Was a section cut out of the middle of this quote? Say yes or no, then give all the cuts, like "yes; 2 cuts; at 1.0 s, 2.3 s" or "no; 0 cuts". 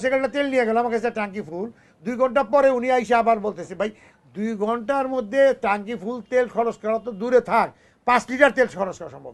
no; 0 cuts